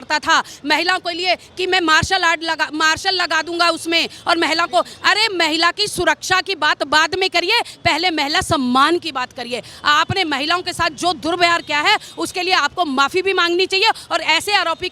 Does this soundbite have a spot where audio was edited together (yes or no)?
no